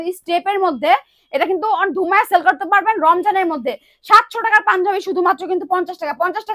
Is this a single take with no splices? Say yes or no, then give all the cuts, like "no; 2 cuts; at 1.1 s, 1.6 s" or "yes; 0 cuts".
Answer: yes; 0 cuts